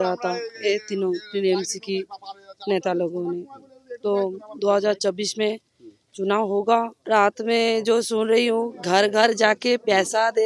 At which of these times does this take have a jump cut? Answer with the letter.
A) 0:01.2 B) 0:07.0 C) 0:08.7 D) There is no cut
B